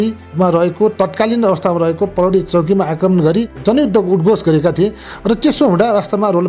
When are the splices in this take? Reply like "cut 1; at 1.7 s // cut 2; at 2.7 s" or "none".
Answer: cut 1; at 3.6 s